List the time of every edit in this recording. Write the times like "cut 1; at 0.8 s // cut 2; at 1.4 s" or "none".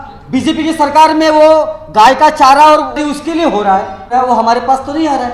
cut 1; at 3.0 s // cut 2; at 4.1 s